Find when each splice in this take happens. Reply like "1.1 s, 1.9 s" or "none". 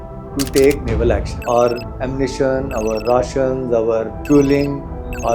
1.3 s, 4.1 s